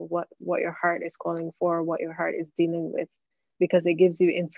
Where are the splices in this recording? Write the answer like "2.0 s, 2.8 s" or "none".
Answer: none